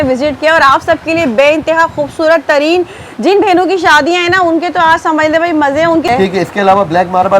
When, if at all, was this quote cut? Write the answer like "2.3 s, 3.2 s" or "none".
6.1 s